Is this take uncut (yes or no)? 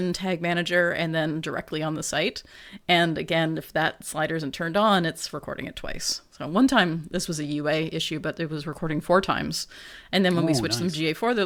yes